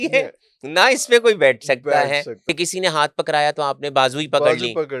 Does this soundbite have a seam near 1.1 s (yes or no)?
no